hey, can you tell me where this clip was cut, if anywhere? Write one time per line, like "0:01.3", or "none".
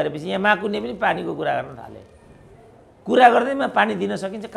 none